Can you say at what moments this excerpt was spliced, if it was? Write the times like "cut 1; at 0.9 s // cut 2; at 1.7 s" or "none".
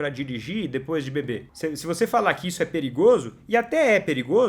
cut 1; at 1.5 s